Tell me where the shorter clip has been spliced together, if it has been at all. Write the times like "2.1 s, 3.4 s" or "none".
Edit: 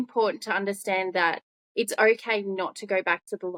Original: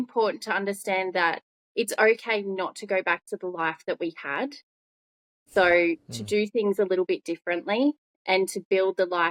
none